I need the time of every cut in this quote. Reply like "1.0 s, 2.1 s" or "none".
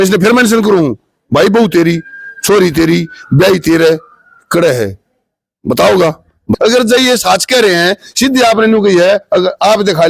6.4 s